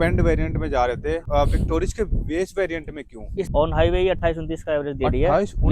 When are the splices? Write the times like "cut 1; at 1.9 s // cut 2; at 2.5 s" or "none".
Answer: cut 1; at 1.2 s // cut 2; at 3.5 s